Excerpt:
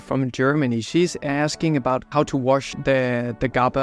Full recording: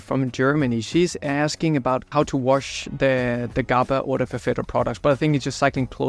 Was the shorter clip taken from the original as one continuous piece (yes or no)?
no